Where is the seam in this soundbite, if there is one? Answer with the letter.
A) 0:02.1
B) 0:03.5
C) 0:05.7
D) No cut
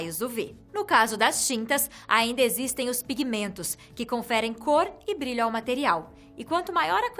D